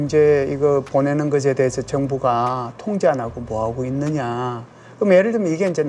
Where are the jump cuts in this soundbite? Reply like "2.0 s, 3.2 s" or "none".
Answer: none

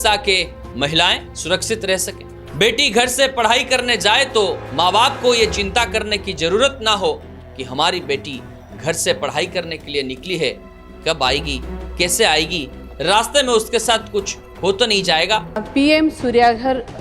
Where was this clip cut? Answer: 15.6 s

